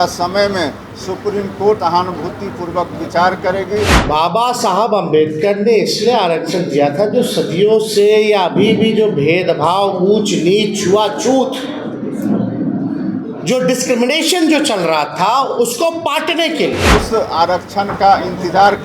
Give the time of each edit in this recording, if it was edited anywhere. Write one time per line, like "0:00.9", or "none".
0:01.8
0:04.0
0:16.9